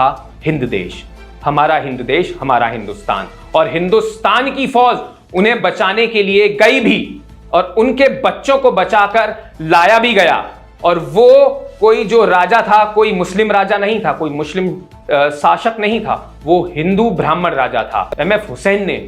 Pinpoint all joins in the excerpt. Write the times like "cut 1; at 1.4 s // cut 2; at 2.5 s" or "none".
cut 1; at 18.1 s

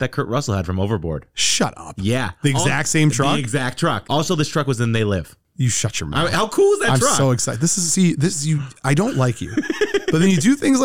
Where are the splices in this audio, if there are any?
none

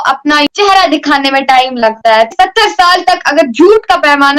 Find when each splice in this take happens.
cut 1; at 2.3 s

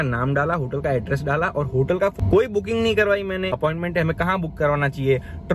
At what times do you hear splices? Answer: cut 1; at 2.1 s // cut 2; at 3.5 s

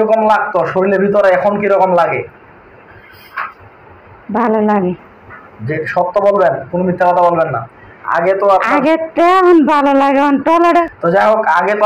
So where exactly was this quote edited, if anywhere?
none

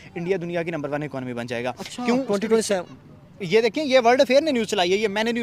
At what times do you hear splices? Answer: none

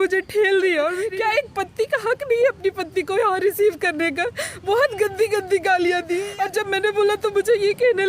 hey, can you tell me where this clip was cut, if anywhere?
cut 1; at 1.0 s // cut 2; at 6.3 s

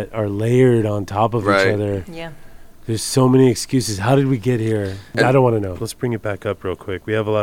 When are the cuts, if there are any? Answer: cut 1; at 5.0 s // cut 2; at 5.8 s

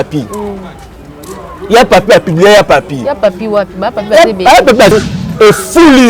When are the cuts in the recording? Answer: cut 1; at 4.9 s

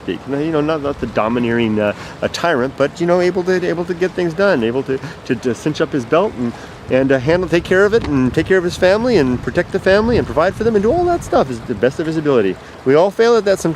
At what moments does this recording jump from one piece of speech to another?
cut 1; at 8.3 s

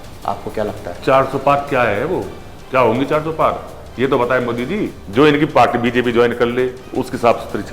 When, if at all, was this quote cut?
cut 1; at 5.0 s // cut 2; at 6.8 s

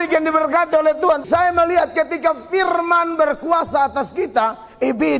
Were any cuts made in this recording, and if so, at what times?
cut 1; at 1.2 s

